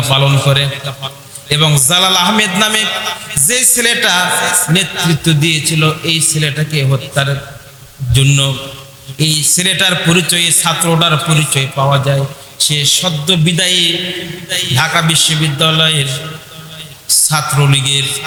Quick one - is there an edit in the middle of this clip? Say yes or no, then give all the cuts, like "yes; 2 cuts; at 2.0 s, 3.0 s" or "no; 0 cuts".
no; 0 cuts